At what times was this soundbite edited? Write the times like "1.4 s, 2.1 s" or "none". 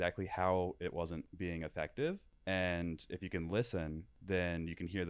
1.3 s, 2.3 s, 4.1 s